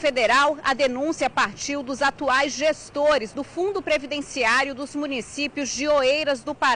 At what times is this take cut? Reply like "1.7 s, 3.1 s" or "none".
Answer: none